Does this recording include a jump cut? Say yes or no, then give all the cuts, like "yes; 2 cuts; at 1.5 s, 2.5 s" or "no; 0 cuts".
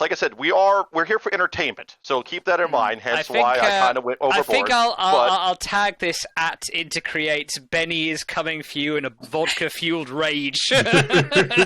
no; 0 cuts